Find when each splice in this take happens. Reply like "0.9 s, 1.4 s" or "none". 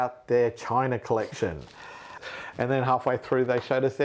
2.1 s

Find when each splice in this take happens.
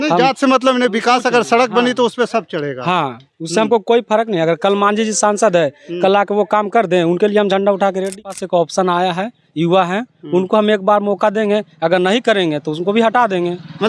8.3 s

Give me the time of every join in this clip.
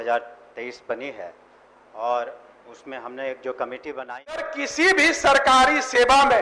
4.5 s

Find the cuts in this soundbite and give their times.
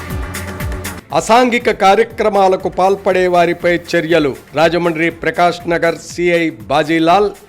none

